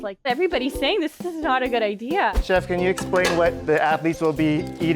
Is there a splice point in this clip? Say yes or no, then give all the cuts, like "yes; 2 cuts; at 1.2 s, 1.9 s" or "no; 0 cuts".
yes; 1 cut; at 2.4 s